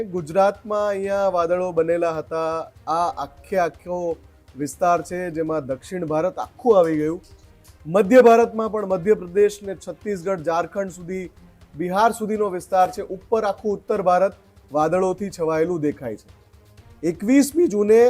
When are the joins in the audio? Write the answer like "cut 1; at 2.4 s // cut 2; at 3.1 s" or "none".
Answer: none

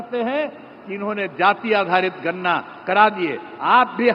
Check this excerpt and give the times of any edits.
none

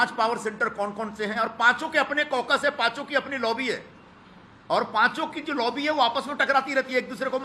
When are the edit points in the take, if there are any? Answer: none

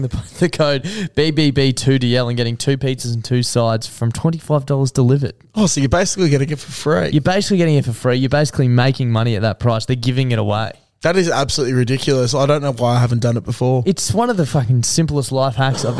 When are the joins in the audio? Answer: none

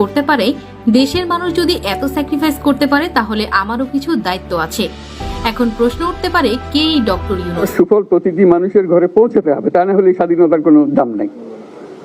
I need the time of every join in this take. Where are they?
cut 1; at 7.7 s

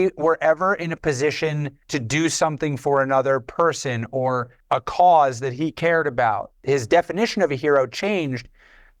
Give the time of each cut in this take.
cut 1; at 6.5 s

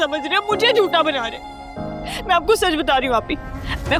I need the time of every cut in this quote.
none

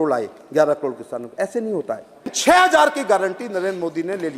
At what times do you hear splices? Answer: cut 1; at 2.4 s

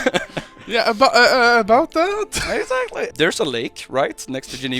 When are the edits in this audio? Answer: cut 1; at 3.0 s

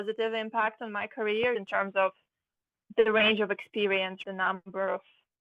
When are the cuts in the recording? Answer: cut 1; at 1.5 s // cut 2; at 4.2 s

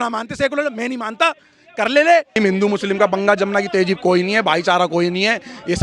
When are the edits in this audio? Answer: cut 1; at 2.4 s

